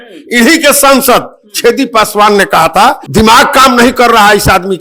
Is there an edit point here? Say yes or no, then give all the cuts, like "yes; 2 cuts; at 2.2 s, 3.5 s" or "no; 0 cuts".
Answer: yes; 1 cut; at 3.0 s